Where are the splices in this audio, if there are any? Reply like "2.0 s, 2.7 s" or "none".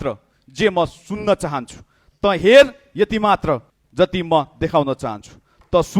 3.8 s